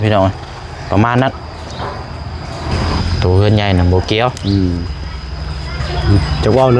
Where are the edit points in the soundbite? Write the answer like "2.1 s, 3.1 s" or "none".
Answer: 3.0 s